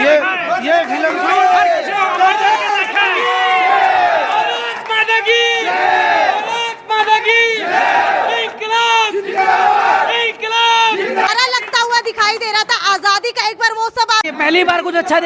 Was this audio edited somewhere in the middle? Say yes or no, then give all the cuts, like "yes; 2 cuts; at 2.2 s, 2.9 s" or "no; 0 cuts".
yes; 2 cuts; at 11.3 s, 14.3 s